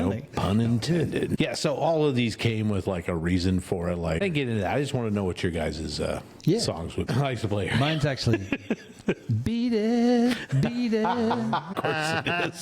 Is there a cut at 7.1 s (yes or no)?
yes